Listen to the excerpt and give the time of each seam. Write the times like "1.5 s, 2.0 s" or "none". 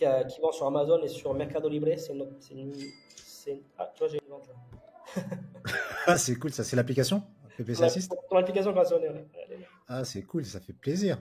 none